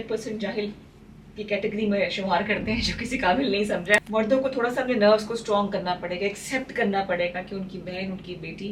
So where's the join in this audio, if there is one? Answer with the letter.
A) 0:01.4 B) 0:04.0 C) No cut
B